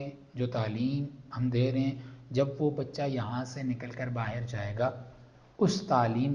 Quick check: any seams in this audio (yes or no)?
no